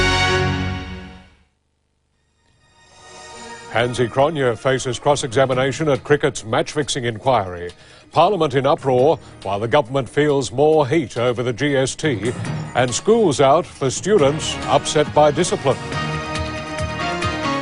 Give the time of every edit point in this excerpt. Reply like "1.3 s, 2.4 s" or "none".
none

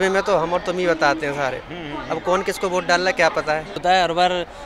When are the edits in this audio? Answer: 3.7 s

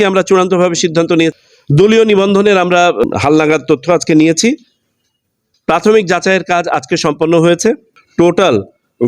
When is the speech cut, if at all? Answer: 1.3 s, 3.1 s, 8.0 s

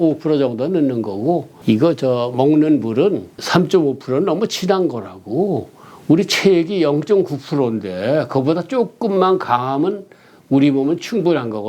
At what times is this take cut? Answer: 1.5 s, 3.4 s

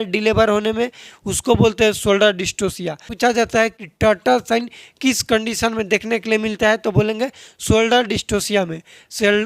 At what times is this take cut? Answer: 3.2 s

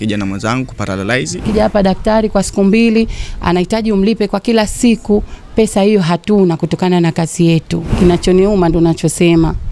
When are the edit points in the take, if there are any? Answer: 1.4 s, 7.8 s

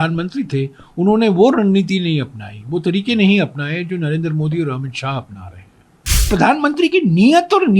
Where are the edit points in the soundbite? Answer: 6.2 s

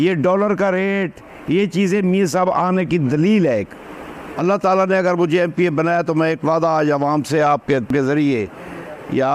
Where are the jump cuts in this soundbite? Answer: 4.2 s

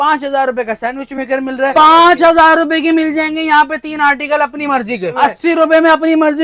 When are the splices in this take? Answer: 1.7 s, 5.1 s

